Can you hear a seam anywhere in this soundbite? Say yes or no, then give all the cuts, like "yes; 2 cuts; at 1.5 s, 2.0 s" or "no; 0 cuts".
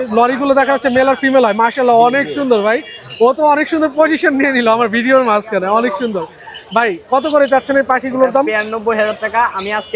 no; 0 cuts